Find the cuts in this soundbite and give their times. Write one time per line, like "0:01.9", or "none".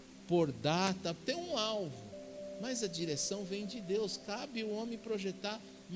none